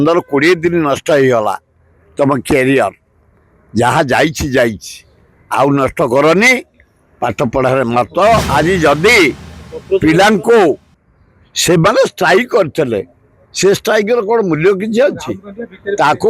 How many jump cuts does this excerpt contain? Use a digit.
1